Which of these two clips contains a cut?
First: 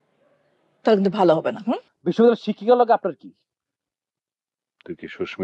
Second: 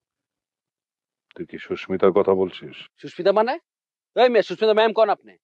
first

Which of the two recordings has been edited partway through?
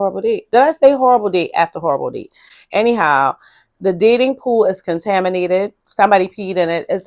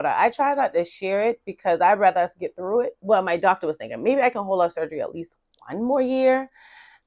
second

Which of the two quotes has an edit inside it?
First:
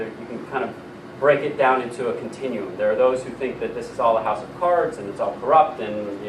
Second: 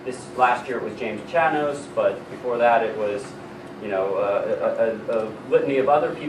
first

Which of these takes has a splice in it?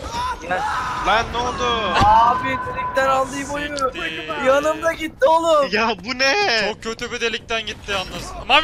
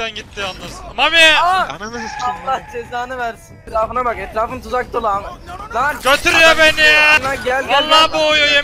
second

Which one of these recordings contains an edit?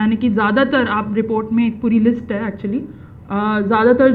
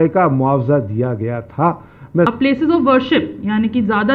second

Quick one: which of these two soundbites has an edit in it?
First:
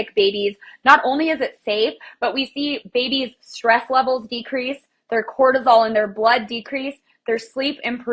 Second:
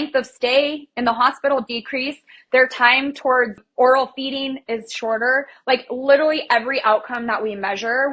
second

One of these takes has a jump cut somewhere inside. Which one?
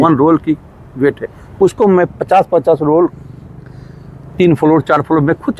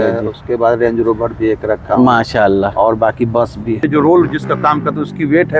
second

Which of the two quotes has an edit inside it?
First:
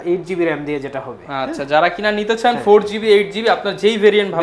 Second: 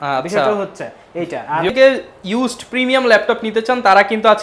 second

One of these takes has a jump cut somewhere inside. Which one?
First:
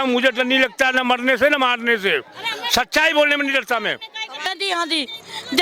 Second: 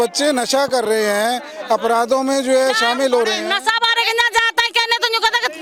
first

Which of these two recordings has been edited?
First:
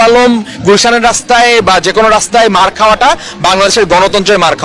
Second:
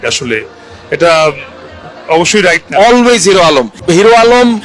second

